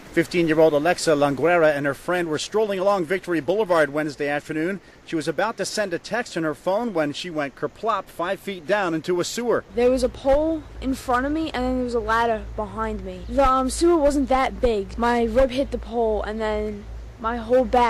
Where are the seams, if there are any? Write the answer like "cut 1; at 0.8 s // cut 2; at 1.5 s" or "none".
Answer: cut 1; at 3.0 s

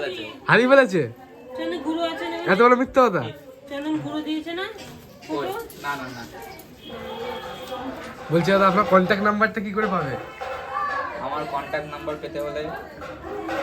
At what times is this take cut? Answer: none

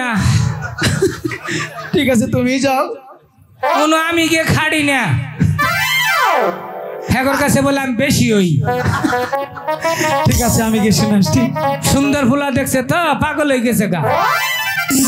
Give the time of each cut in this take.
none

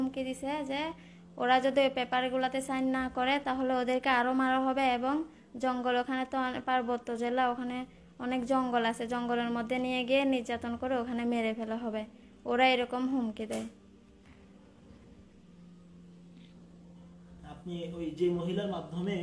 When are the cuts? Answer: none

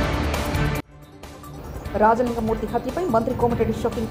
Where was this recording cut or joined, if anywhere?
cut 1; at 1.0 s

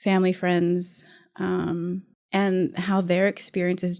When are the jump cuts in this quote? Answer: cut 1; at 2.1 s

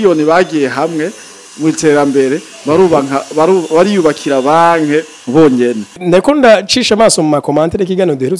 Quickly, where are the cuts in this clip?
cut 1; at 5.9 s

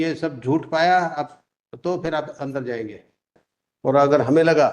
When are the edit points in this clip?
cut 1; at 3.4 s

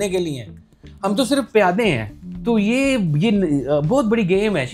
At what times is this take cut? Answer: none

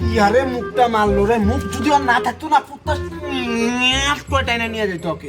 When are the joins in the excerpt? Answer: cut 1; at 4.4 s

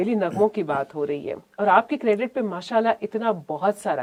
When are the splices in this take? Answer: none

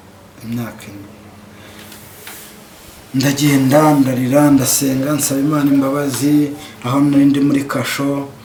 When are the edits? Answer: none

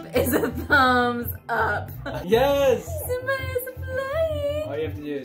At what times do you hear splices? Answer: cut 1; at 2.2 s

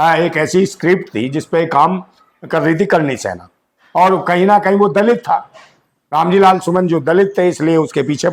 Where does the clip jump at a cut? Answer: none

